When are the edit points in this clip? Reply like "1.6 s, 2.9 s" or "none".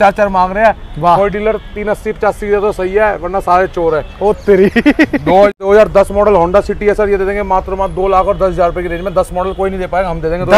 5.5 s